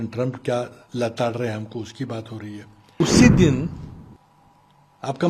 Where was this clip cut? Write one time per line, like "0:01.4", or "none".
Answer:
0:03.0